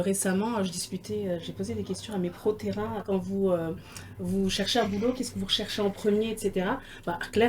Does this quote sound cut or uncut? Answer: cut